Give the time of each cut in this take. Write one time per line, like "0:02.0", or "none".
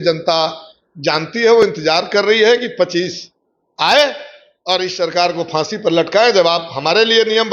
none